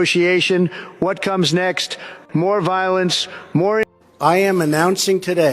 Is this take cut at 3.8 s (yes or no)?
yes